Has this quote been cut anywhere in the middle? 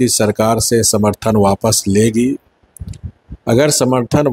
no; 0 cuts

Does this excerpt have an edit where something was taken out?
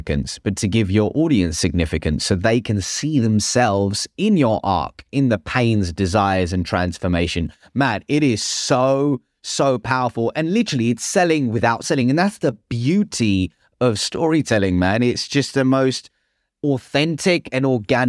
yes; 1 cut; at 11.8 s

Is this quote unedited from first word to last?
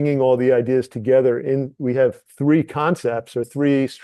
yes; 0 cuts

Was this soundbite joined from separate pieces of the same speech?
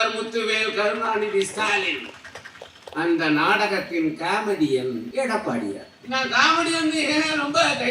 yes; 2 cuts; at 5.1 s, 5.9 s

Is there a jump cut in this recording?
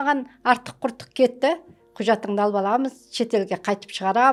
no; 0 cuts

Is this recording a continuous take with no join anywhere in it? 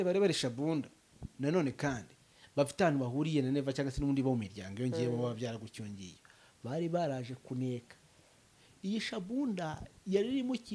yes; 0 cuts

